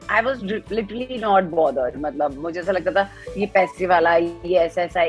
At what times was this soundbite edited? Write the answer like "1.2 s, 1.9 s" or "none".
none